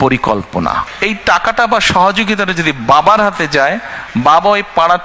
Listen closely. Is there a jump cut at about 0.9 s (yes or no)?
yes